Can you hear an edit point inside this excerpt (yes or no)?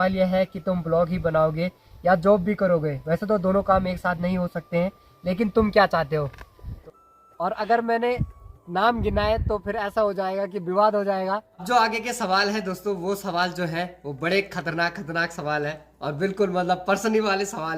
yes